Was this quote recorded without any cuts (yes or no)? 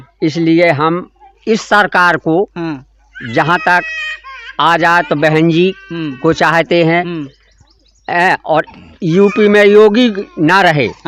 yes